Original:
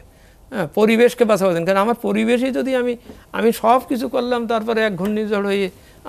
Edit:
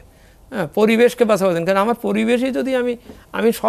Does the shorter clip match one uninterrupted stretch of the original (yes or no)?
yes